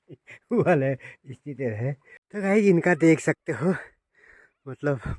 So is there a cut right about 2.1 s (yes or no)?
yes